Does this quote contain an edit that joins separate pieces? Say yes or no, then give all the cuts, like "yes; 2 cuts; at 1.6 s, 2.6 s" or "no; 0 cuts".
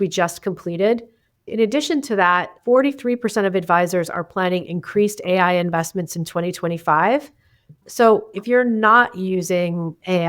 yes; 1 cut; at 8.3 s